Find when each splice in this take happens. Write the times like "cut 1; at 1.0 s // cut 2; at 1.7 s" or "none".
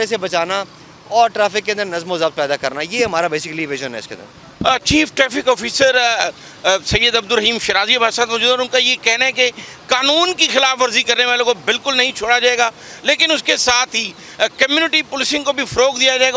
none